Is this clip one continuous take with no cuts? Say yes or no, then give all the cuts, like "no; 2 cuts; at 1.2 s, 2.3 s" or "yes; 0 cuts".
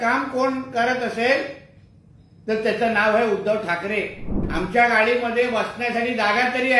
no; 1 cut; at 4.4 s